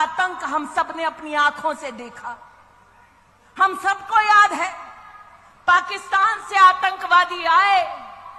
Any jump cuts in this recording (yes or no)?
no